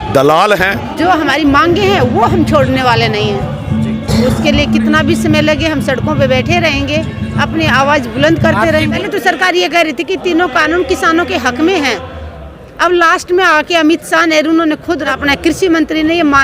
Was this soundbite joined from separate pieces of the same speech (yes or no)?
yes